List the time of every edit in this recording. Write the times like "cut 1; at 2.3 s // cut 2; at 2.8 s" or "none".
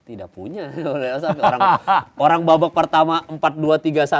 none